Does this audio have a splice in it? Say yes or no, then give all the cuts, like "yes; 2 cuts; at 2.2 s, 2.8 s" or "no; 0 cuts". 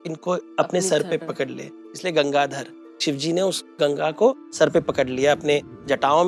no; 0 cuts